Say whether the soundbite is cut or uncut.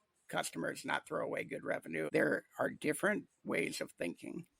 cut